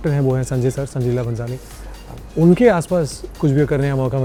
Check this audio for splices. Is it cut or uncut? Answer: uncut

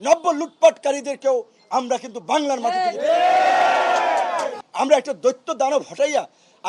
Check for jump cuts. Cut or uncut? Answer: cut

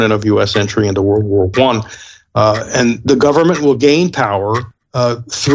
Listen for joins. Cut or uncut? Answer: uncut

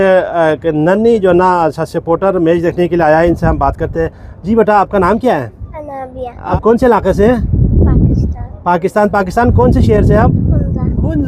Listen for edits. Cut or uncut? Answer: cut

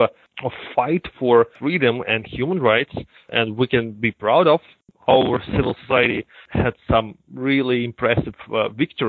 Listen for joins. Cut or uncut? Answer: cut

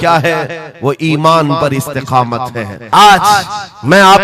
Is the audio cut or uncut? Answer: cut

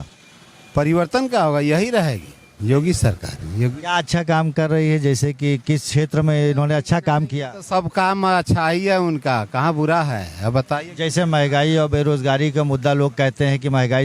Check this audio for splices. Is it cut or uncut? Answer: uncut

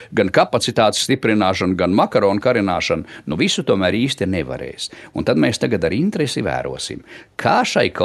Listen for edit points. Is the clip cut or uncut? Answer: uncut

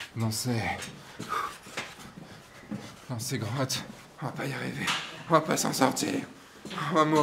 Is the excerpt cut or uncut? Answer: cut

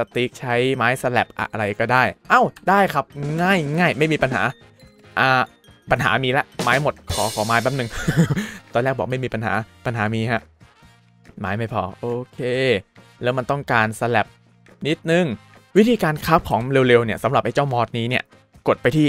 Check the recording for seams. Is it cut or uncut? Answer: uncut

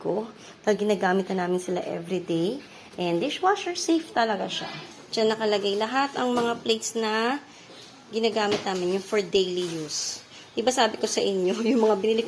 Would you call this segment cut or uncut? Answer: cut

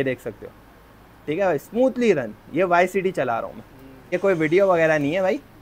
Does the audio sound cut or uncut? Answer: cut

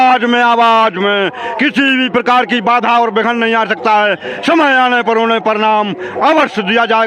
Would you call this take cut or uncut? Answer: uncut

